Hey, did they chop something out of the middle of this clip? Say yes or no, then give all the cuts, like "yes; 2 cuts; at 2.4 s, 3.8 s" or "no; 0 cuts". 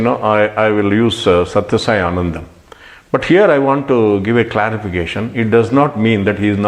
no; 0 cuts